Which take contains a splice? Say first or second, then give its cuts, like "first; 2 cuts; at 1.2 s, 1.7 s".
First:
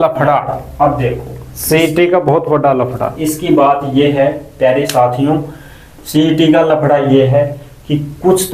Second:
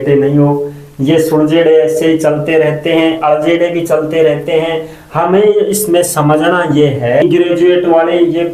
second; 1 cut; at 7.2 s